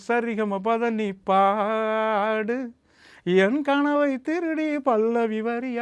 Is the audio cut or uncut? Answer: uncut